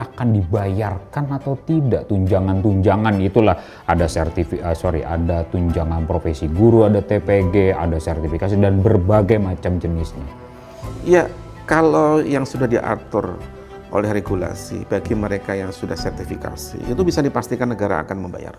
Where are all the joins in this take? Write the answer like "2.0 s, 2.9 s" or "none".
none